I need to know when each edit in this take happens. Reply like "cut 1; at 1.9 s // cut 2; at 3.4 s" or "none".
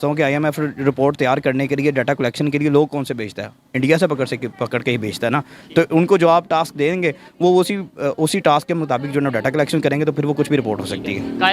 none